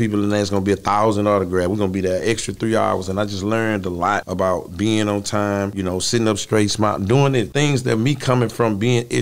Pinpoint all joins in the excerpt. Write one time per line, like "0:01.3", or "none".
0:04.3
0:05.7
0:07.5

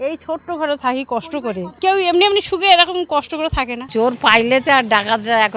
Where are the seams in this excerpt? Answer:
0:01.7
0:03.8

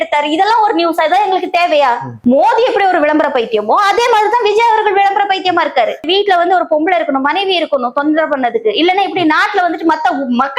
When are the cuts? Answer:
0:02.1
0:06.0

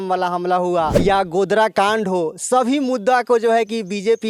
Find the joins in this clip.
0:00.9

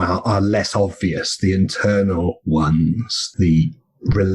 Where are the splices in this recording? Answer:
0:03.3

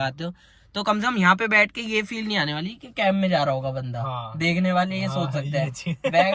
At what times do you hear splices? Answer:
none

